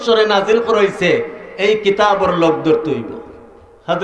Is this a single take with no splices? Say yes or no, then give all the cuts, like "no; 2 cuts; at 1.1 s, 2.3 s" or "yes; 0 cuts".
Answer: yes; 0 cuts